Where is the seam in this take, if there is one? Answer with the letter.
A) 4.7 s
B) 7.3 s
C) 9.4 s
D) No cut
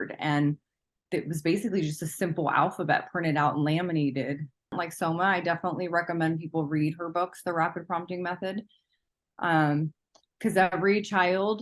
A